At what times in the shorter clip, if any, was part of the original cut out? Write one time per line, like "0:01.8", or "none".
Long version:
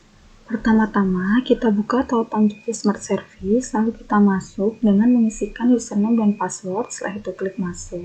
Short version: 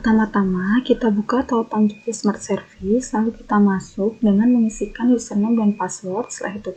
none